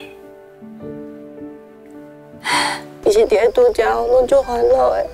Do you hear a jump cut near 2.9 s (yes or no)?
yes